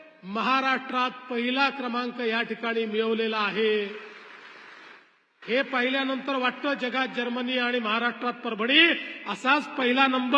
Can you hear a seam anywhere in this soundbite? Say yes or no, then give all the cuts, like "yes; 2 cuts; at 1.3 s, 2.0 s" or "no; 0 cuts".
no; 0 cuts